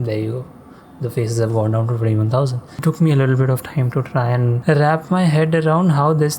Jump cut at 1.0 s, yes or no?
no